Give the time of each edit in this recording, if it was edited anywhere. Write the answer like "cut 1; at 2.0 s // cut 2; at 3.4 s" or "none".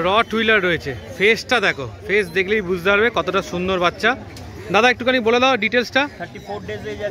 none